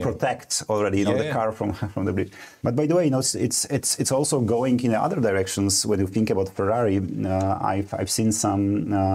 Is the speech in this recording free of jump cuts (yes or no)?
no